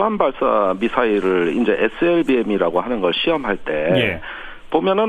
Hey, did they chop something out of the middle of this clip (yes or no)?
yes